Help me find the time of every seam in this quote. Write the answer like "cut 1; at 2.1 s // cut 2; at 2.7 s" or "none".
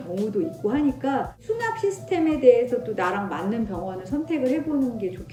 none

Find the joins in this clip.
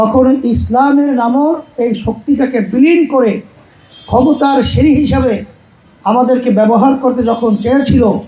cut 1; at 1.7 s

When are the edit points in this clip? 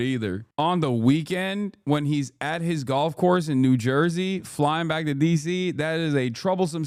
none

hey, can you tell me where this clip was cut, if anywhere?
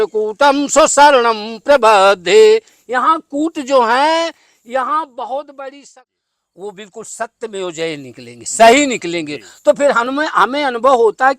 cut 1; at 5.9 s

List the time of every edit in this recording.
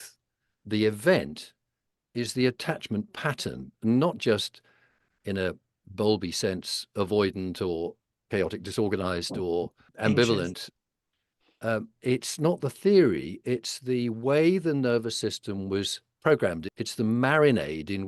cut 1; at 9.8 s // cut 2; at 16.7 s

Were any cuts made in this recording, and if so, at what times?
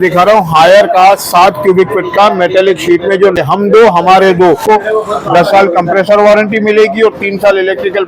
cut 1; at 3.1 s // cut 2; at 4.6 s

